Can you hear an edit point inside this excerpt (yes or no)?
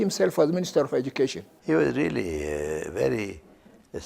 yes